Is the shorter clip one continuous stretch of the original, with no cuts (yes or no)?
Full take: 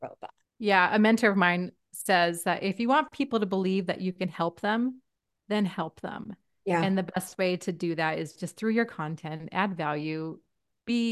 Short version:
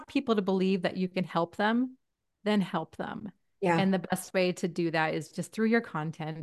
yes